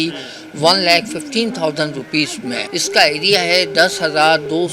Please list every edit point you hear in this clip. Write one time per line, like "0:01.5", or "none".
0:02.7